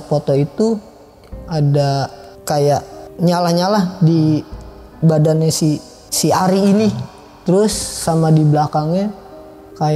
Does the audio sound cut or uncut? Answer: cut